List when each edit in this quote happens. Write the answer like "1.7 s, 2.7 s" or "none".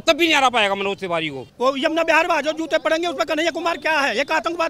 1.4 s